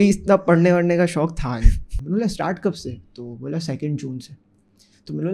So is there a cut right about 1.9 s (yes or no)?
yes